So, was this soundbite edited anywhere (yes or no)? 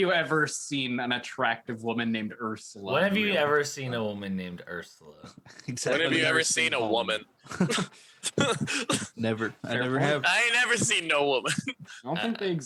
no